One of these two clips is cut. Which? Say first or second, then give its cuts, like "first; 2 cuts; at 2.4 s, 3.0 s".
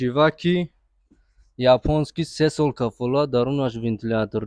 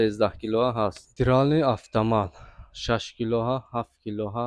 second; 1 cut; at 1.0 s